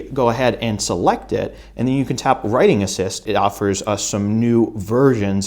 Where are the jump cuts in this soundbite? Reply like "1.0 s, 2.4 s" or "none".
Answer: 3.3 s